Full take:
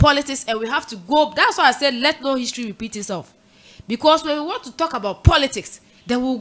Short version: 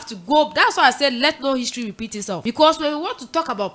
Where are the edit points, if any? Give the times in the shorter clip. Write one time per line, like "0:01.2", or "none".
0:02.4